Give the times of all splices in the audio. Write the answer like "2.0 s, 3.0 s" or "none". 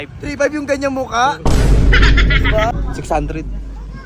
2.7 s